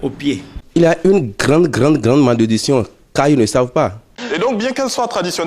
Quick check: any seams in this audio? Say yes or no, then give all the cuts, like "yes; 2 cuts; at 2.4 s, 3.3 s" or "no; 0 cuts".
yes; 2 cuts; at 1.0 s, 4.1 s